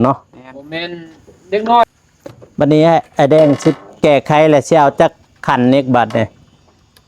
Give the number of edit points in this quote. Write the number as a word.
one